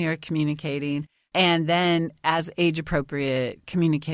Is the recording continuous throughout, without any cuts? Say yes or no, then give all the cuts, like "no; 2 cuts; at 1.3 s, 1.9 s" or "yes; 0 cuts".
no; 1 cut; at 1.2 s